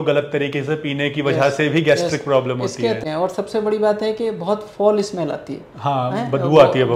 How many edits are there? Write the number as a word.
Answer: one